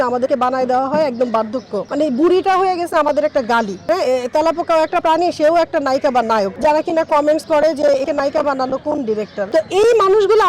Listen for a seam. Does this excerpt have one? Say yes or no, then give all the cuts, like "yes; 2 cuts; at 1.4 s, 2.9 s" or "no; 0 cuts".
yes; 3 cuts; at 3.8 s, 6.6 s, 9.5 s